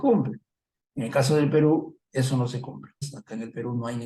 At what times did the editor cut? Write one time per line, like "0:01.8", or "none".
0:03.0